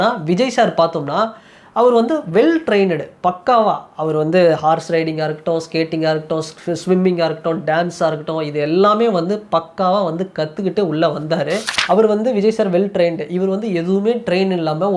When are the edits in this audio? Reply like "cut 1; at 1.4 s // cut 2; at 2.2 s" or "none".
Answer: cut 1; at 11.7 s